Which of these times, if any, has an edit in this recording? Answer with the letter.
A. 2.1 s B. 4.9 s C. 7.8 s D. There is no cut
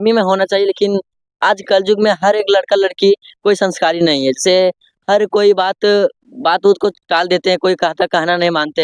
D